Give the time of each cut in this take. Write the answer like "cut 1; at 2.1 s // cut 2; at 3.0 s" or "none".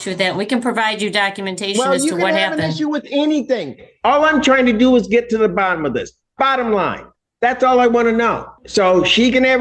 cut 1; at 8.5 s